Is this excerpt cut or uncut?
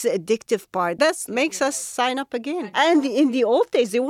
cut